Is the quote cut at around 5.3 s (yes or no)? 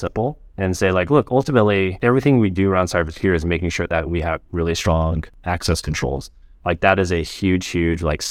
yes